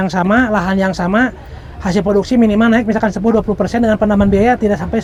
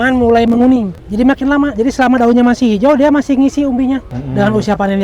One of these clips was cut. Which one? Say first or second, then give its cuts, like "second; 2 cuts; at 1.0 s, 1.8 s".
second; 2 cuts; at 0.9 s, 4.2 s